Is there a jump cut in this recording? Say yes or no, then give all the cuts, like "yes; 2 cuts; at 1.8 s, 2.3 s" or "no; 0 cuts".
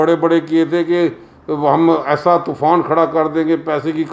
no; 0 cuts